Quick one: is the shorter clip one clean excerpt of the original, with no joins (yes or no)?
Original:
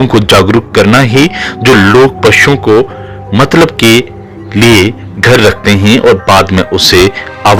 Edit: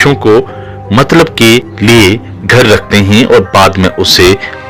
no